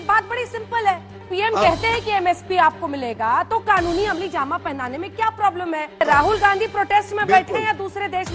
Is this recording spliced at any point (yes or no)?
yes